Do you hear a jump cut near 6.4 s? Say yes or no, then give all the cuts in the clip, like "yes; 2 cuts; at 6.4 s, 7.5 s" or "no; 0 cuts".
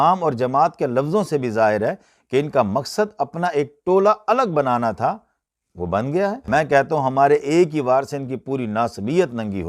yes; 1 cut; at 6.4 s